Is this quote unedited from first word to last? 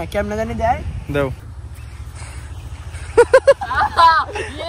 no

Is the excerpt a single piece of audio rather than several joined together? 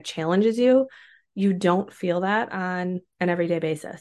no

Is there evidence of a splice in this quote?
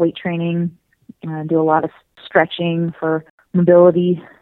yes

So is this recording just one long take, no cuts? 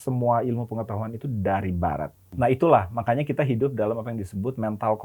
no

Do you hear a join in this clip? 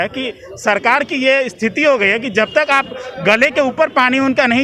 no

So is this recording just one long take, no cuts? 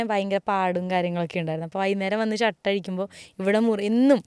yes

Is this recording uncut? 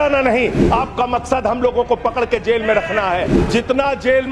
yes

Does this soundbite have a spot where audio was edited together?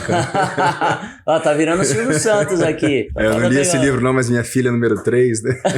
yes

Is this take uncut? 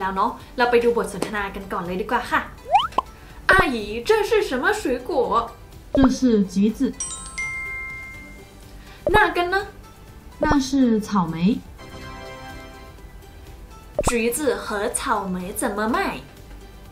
yes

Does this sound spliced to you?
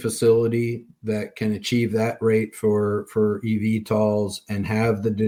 no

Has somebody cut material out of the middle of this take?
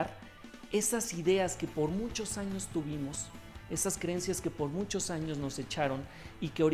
no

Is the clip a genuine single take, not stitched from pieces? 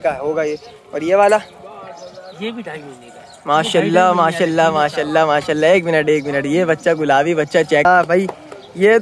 no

